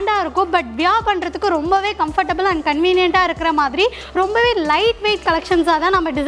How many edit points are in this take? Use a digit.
0